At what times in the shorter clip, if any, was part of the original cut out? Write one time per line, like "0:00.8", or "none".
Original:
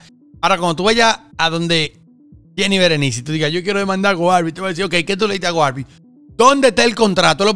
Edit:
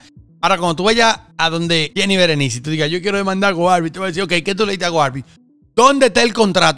0:01.9